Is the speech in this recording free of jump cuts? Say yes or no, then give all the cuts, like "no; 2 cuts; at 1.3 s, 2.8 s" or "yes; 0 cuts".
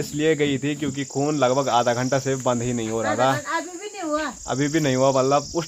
yes; 0 cuts